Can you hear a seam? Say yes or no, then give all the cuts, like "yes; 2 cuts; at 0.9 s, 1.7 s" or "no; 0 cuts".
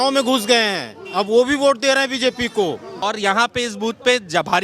yes; 1 cut; at 2.9 s